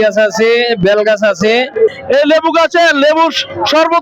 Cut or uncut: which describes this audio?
cut